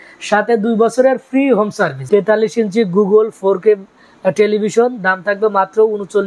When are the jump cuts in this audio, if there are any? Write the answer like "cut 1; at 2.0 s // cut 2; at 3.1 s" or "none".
cut 1; at 2.0 s